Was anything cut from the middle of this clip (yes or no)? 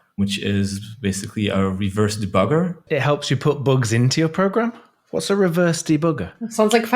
yes